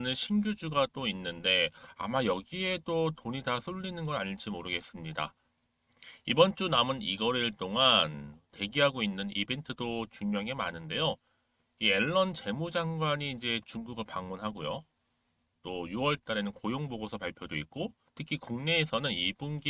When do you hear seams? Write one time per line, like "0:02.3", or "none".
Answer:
none